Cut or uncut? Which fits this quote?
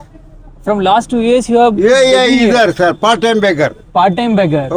uncut